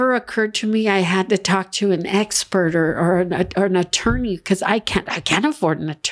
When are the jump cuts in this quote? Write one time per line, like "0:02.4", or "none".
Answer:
none